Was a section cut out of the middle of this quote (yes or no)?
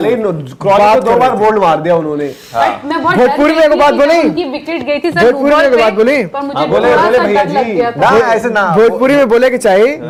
no